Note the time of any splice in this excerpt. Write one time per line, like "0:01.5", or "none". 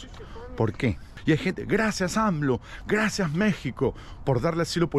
0:01.1